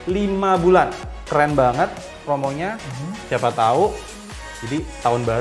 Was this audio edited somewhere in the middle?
yes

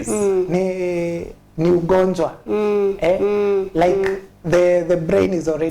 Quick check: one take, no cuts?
yes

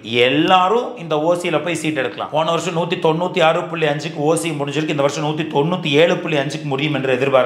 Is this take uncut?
no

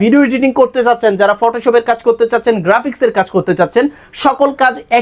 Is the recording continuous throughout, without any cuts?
yes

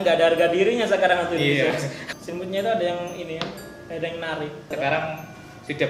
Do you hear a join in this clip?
yes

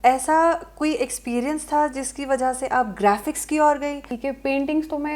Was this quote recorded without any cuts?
no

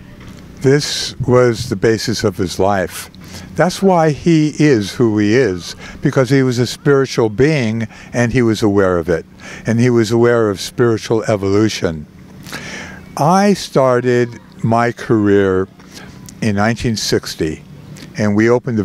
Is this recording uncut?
yes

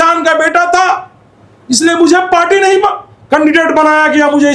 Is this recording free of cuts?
yes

